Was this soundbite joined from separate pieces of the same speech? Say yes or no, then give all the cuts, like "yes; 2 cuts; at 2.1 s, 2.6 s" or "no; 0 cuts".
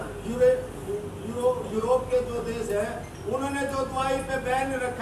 no; 0 cuts